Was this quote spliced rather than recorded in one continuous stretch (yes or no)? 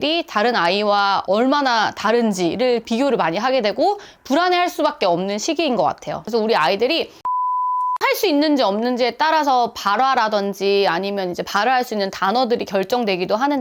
yes